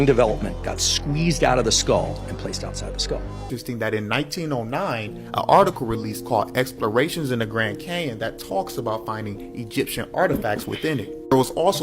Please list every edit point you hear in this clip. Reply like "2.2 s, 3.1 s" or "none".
3.5 s